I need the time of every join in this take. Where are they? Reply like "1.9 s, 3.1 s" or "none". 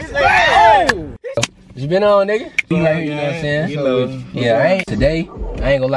1.5 s, 2.7 s, 4.9 s